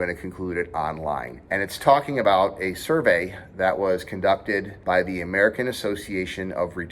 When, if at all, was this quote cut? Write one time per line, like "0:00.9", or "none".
0:01.3
0:04.7